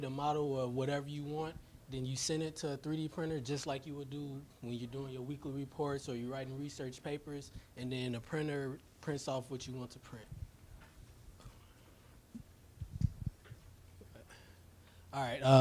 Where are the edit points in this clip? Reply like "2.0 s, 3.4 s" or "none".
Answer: none